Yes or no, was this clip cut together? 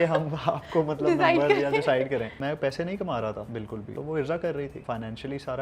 yes